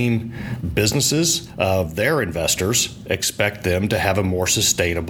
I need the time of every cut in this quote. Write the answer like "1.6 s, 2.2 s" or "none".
1.5 s